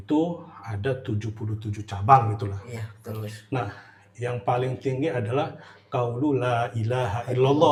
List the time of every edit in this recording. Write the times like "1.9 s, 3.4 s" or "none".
none